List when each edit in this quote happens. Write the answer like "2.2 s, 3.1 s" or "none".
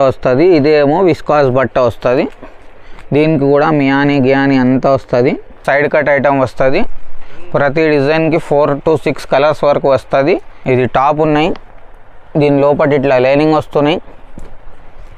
5.5 s, 10.5 s